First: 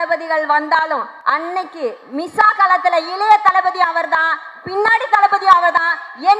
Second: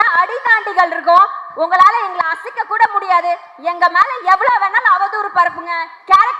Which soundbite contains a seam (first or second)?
first